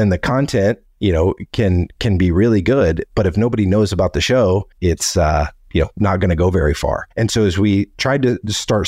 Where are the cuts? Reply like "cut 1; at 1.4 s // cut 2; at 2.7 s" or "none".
cut 1; at 4.7 s // cut 2; at 7.1 s